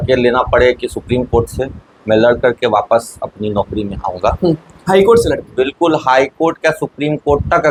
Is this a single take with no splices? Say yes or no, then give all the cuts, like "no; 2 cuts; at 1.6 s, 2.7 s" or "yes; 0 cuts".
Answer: yes; 0 cuts